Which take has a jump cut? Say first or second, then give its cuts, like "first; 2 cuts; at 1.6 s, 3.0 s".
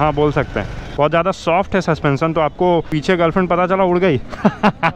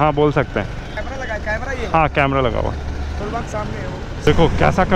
first; 2 cuts; at 1.0 s, 2.9 s